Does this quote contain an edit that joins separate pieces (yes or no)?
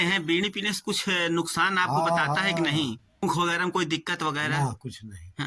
yes